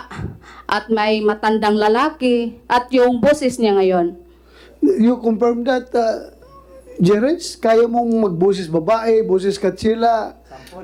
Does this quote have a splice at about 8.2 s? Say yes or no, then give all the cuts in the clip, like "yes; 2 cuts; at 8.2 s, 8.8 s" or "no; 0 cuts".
no; 0 cuts